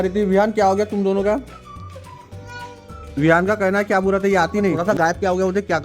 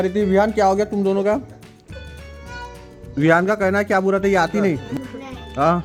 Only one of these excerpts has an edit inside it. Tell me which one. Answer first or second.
first